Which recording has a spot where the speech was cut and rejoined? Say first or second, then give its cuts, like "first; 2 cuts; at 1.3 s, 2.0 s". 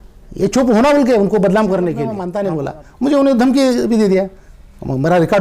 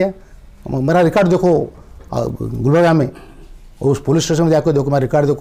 first; 1 cut; at 2.3 s